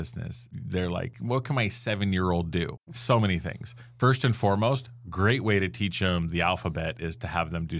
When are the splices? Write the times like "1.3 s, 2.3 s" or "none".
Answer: 1.1 s, 2.8 s